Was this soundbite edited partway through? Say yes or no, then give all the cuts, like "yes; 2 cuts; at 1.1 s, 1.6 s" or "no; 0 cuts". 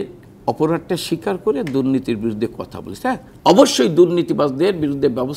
yes; 1 cut; at 3.3 s